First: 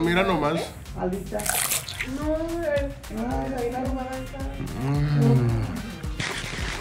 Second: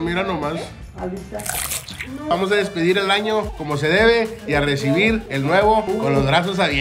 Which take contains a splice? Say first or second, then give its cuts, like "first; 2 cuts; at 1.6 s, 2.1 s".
second; 4 cuts; at 2.3 s, 3.6 s, 5.3 s, 5.9 s